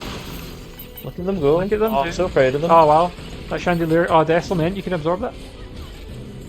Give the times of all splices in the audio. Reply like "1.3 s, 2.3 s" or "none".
0.9 s